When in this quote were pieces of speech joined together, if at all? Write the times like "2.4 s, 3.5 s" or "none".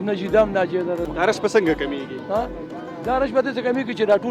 1.1 s

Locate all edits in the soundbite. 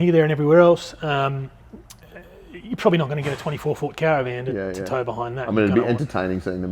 none

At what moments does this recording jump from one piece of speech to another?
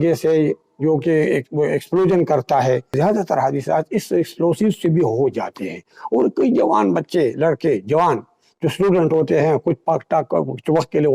2.9 s

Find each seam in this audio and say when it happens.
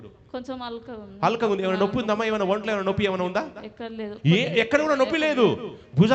none

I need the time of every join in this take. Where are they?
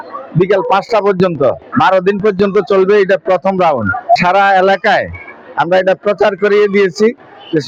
none

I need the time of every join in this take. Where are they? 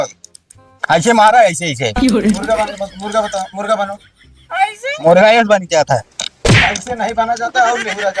none

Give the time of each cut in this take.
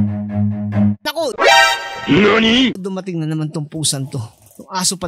0.9 s

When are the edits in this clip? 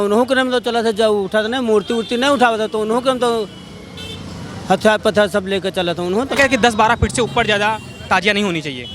6.3 s

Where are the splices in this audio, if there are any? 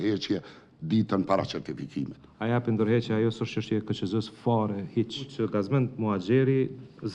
2.2 s, 5.3 s

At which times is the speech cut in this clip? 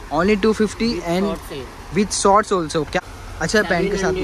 2.9 s

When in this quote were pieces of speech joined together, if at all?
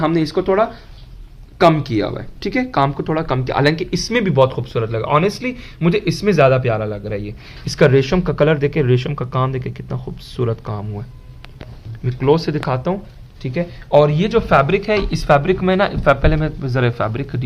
none

